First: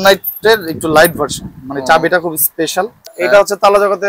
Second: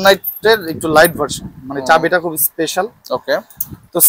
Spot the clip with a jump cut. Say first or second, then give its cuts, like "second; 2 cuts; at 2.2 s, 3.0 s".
first; 1 cut; at 3.0 s